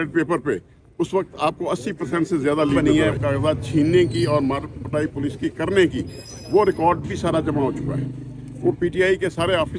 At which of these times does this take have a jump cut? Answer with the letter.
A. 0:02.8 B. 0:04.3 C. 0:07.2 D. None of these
A